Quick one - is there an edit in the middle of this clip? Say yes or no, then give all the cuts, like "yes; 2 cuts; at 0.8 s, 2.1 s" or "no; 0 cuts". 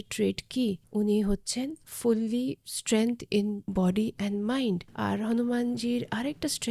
yes; 4 cuts; at 0.8 s, 1.8 s, 3.6 s, 4.9 s